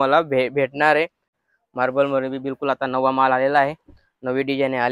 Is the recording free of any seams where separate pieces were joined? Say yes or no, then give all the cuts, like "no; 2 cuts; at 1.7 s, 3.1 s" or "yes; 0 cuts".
no; 1 cut; at 1.2 s